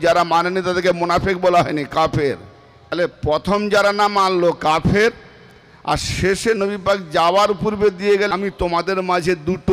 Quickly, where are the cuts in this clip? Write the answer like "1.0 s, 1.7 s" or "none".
3.0 s, 8.3 s